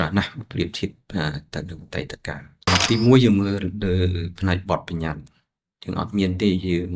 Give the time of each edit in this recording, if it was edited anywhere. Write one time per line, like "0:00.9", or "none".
0:02.7